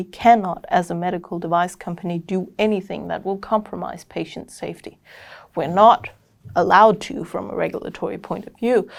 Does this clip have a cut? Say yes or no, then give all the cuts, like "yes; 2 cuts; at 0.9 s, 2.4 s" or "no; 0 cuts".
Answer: no; 0 cuts